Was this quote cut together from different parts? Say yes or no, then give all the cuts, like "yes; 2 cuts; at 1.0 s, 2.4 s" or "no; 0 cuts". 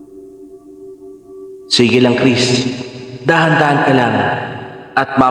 yes; 1 cut; at 1.7 s